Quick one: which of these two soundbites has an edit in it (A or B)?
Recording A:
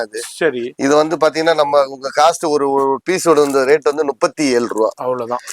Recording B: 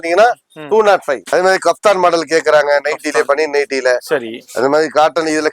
B